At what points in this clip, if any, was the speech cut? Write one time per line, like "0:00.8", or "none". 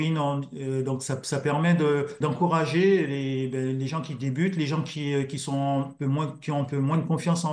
0:02.1